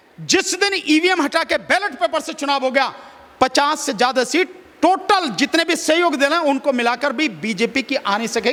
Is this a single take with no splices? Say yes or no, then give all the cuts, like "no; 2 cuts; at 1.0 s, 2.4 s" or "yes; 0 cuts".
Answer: yes; 0 cuts